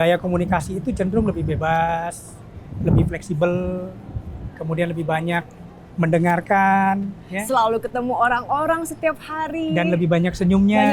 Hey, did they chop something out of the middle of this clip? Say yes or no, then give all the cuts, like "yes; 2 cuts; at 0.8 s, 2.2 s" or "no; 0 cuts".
no; 0 cuts